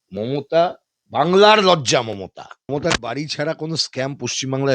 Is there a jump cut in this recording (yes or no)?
yes